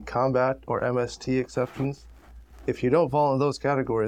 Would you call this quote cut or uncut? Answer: uncut